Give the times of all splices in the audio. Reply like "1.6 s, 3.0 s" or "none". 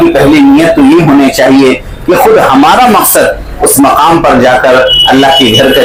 none